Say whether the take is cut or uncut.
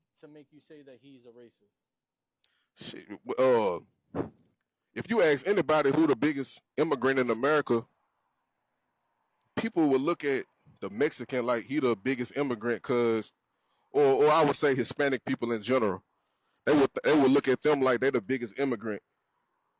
uncut